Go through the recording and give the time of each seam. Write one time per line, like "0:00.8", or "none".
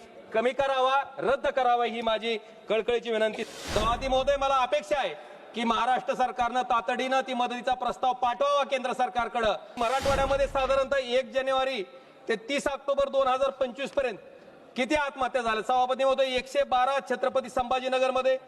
0:03.4
0:09.7

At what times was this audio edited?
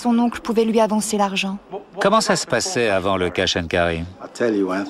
0:03.3

